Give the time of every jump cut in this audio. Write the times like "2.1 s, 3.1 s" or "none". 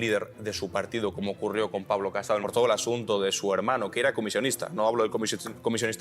2.4 s